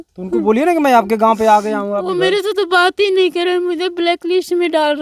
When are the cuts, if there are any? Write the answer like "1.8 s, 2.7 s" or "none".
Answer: none